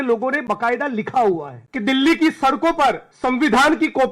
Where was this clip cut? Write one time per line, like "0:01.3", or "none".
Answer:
0:01.6
0:03.1